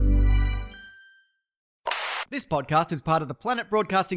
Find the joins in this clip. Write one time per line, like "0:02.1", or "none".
0:02.0